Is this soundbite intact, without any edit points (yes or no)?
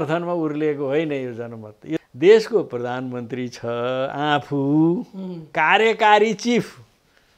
no